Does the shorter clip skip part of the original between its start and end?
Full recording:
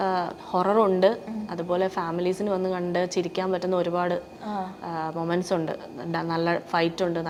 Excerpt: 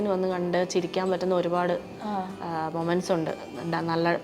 no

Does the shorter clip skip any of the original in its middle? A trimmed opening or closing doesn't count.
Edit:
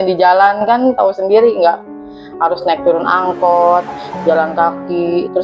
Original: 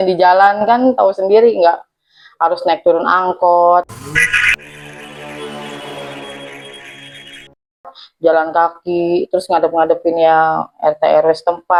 yes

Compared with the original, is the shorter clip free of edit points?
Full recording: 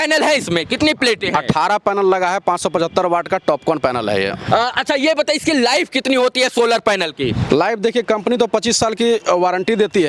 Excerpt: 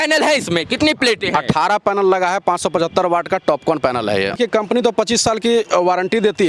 no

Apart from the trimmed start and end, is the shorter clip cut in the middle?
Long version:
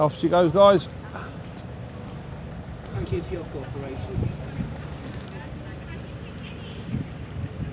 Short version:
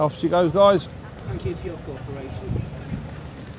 yes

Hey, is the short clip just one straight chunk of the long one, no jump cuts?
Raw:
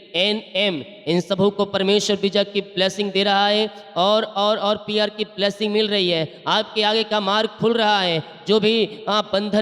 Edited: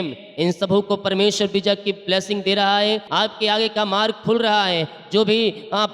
no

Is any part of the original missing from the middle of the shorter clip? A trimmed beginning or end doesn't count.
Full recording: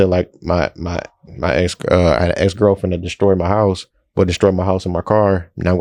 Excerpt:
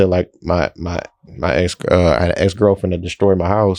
no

